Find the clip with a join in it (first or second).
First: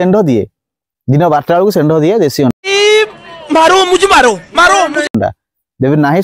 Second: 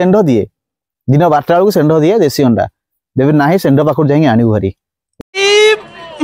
second